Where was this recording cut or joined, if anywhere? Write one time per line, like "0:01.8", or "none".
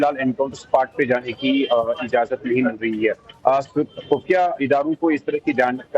0:02.8